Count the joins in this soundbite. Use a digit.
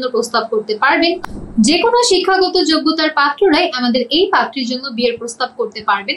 1